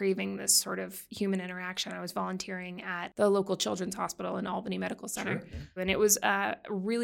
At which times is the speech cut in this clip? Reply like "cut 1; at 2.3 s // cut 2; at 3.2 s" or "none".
cut 1; at 3.1 s // cut 2; at 5.8 s